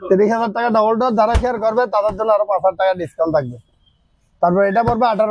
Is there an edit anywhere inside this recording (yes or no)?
no